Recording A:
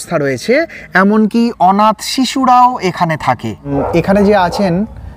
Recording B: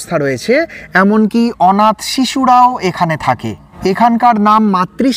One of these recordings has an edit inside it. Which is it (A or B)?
A